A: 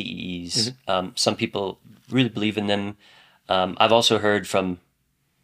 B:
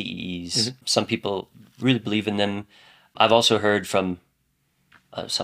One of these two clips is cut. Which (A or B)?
B